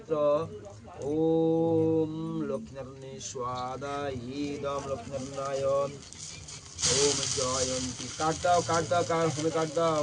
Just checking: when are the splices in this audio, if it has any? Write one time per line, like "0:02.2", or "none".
none